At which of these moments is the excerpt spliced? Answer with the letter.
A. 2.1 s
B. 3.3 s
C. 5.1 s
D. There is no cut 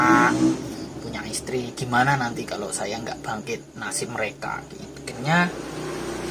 C